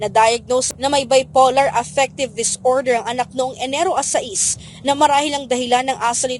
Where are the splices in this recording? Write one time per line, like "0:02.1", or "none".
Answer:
none